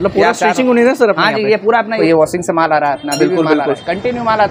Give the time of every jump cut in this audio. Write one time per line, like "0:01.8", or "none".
0:02.0

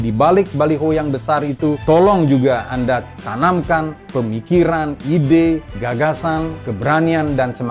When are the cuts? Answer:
0:01.8
0:03.2
0:04.0
0:05.7
0:06.6

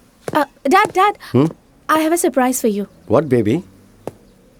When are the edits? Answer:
none

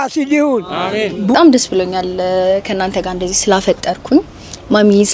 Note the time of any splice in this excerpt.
0:01.3

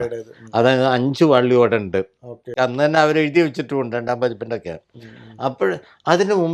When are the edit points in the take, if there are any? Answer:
0:02.5

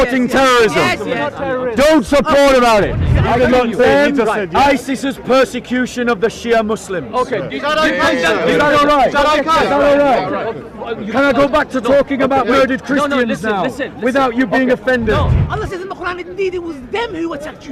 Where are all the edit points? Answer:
0:03.1
0:15.4

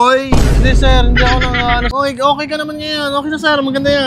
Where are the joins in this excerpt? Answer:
0:01.9

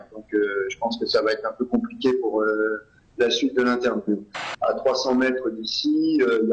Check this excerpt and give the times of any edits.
0:04.4

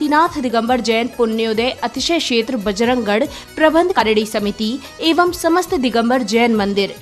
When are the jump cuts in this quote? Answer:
0:04.0

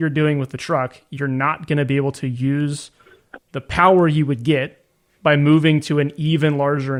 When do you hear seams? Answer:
none

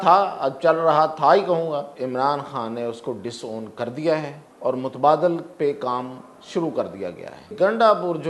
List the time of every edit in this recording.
0:01.9
0:04.4
0:07.5

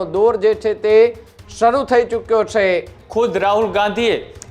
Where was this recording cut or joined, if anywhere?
0:03.0

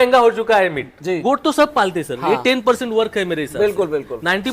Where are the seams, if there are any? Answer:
0:01.2

